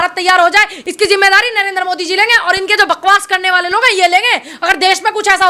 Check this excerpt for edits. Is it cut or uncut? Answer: uncut